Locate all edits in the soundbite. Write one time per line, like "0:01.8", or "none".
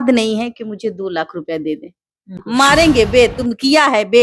0:02.4